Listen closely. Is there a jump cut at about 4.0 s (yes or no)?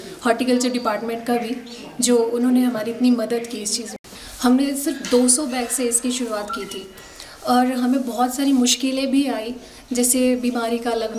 yes